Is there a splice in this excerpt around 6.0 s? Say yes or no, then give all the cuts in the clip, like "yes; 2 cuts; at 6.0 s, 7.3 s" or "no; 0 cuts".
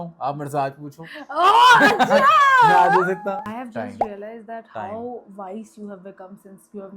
no; 1 cut; at 3.4 s